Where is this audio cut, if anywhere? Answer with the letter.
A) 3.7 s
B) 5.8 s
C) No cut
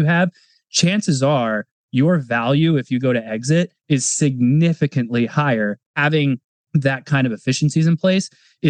B